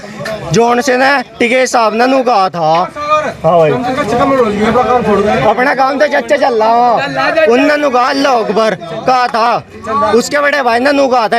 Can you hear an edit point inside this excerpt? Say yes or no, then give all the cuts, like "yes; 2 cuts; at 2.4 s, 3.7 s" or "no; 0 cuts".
no; 0 cuts